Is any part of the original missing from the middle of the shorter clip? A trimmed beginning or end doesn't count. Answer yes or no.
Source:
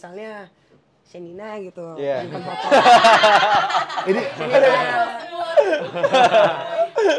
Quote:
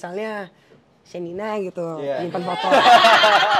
no